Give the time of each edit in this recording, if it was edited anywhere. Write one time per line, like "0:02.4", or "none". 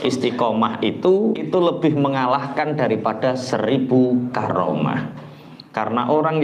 0:01.4